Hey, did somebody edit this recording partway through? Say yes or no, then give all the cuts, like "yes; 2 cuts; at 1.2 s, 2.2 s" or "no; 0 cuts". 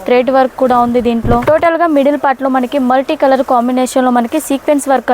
yes; 1 cut; at 1.5 s